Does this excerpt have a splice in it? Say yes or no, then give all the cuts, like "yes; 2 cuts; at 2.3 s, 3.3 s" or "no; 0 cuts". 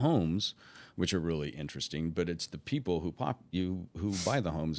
no; 0 cuts